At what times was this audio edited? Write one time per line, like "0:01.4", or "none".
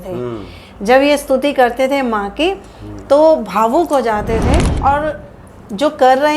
0:04.7